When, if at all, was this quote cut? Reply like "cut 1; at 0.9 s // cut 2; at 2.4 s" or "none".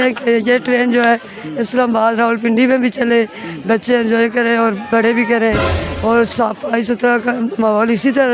none